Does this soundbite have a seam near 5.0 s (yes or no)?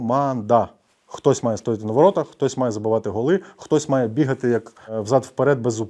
yes